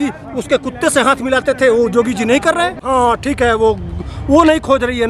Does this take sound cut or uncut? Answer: cut